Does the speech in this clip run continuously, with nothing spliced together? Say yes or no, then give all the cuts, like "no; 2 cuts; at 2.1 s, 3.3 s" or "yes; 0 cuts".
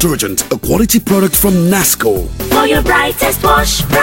no; 1 cut; at 2.3 s